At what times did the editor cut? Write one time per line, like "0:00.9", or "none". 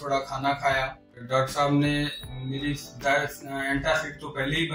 0:01.1